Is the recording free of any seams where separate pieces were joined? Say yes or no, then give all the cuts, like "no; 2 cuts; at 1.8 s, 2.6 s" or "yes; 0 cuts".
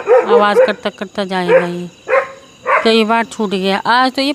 yes; 0 cuts